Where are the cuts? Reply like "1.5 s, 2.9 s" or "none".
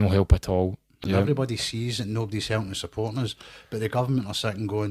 1.0 s

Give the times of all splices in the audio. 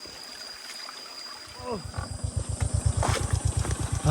1.5 s

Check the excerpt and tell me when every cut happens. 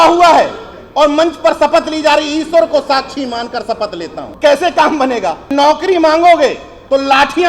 4.3 s, 5.5 s

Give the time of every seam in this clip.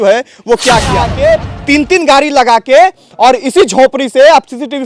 1.1 s

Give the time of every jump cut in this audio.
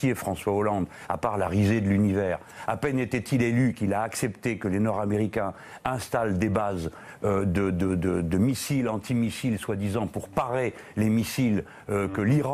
4.4 s

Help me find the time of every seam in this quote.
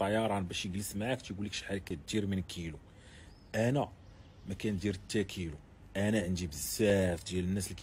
none

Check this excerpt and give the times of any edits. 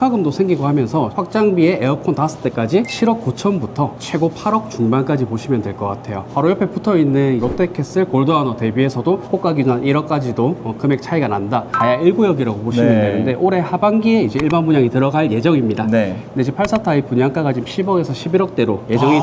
1.1 s, 2.9 s, 7.4 s, 9.2 s, 11.7 s

